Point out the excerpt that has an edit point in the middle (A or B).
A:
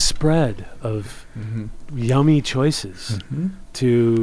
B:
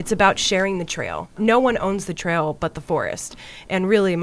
B